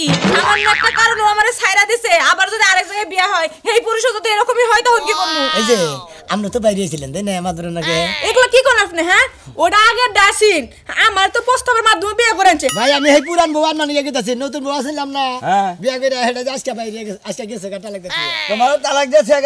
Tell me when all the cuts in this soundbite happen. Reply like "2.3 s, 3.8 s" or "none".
5.5 s, 12.7 s